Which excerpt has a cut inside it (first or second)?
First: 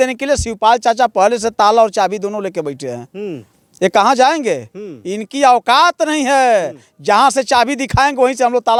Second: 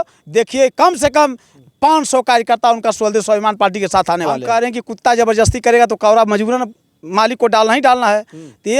second